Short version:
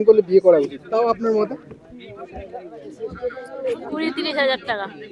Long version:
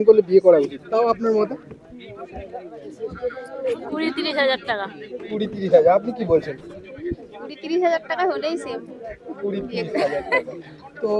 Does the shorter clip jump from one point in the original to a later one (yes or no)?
no